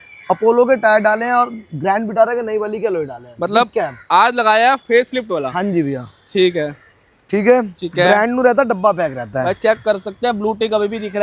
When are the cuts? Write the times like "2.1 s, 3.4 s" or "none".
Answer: none